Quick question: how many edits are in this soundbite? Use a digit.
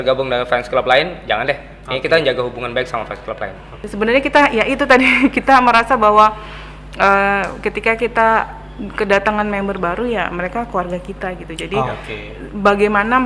1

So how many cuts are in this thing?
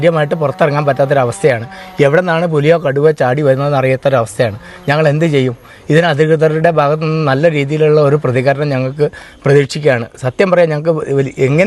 0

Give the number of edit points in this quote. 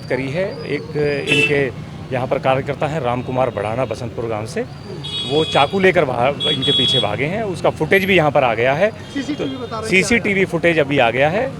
0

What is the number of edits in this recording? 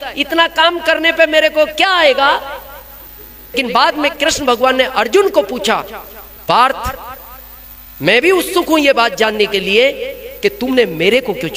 1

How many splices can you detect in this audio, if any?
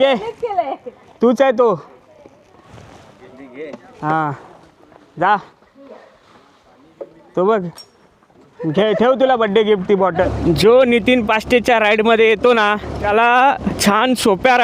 3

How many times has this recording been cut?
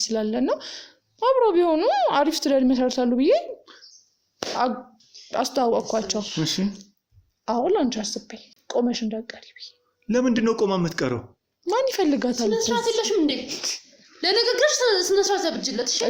0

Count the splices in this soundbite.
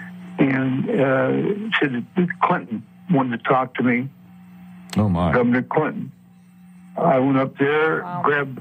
0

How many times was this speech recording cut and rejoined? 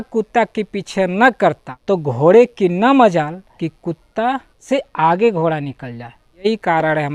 4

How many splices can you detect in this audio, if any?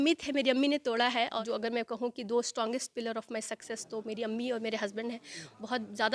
1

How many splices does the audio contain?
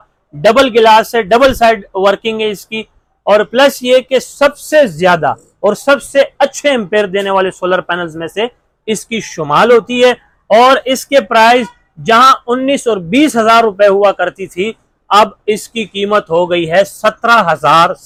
0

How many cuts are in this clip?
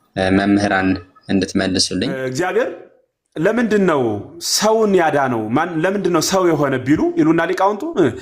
1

